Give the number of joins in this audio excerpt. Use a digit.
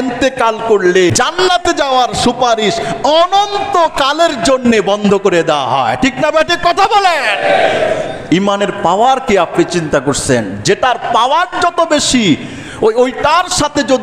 1